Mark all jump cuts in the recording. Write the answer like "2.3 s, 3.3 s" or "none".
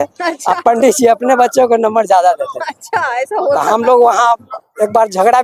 none